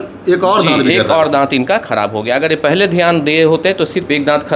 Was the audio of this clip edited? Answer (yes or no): no